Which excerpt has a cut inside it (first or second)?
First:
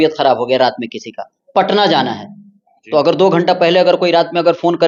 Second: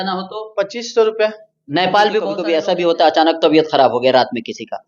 second